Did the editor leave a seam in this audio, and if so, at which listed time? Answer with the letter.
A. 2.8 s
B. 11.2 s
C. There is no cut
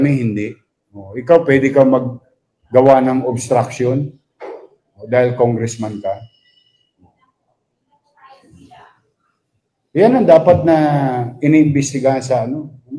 C